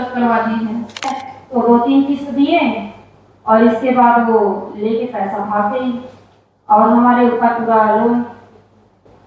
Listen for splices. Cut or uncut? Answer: cut